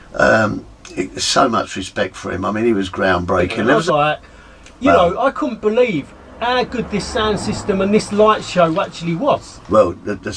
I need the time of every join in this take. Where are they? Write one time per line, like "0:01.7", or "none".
0:03.8

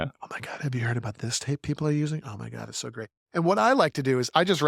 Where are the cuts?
none

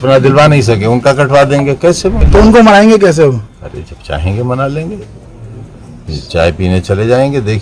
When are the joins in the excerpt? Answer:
0:02.2

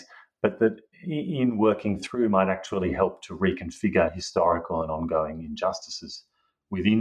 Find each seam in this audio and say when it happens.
none

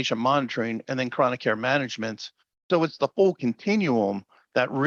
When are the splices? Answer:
none

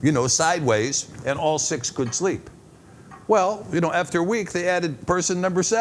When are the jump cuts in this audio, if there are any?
none

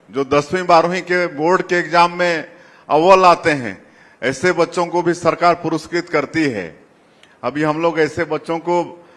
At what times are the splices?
none

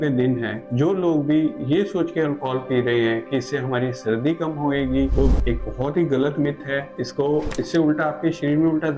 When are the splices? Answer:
none

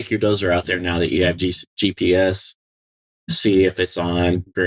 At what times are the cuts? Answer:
none

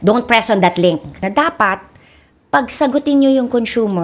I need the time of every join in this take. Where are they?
0:01.3

